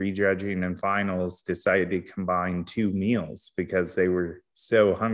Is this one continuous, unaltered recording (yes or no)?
yes